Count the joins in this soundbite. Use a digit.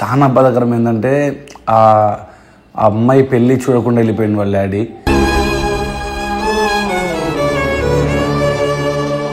0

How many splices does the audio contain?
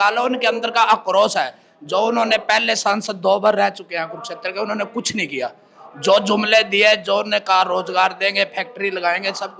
0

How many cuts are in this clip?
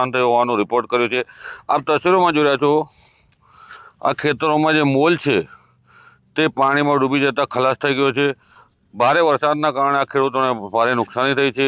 0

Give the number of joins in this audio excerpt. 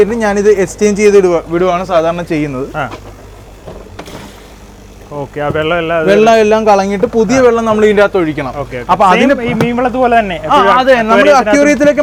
0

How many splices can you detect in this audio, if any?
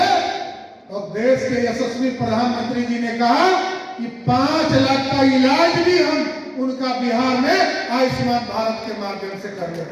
0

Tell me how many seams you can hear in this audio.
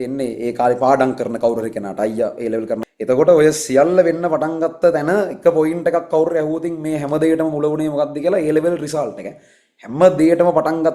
1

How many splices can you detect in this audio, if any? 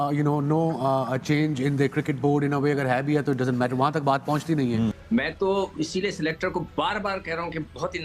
1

